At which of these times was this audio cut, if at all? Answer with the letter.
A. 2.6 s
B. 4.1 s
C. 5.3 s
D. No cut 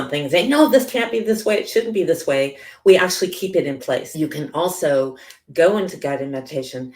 B